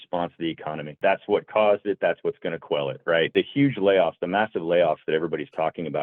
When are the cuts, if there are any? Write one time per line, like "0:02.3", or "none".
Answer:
0:00.9
0:03.3